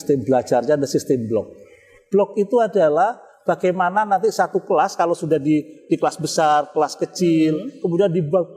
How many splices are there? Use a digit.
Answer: 1